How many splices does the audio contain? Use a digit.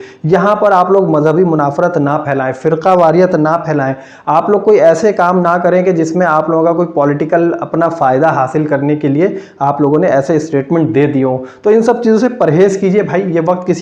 0